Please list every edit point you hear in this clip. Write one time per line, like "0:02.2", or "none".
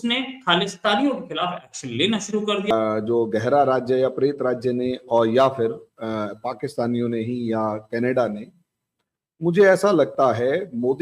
0:02.7